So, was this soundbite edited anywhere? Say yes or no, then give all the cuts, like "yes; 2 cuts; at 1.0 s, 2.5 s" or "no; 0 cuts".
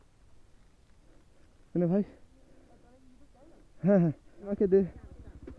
yes; 1 cut; at 4.5 s